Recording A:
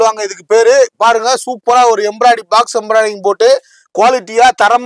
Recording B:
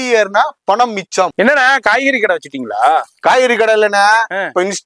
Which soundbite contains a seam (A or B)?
B